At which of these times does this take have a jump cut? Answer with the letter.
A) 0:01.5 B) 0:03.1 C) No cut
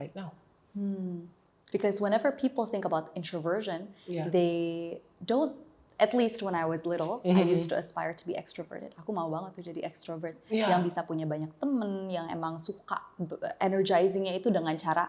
A